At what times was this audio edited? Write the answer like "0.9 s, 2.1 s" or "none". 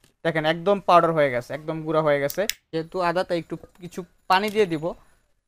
2.6 s